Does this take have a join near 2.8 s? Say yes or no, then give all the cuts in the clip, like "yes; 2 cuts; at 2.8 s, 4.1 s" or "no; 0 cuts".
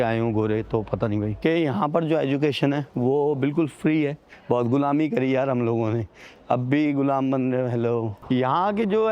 no; 3 cuts; at 1.3 s, 4.3 s, 8.1 s